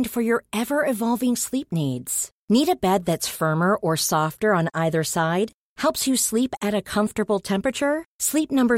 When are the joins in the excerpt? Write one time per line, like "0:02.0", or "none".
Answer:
none